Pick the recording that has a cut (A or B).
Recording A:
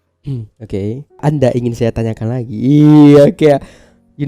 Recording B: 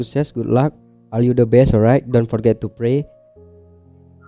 A